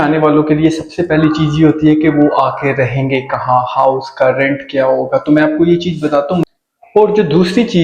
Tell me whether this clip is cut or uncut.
cut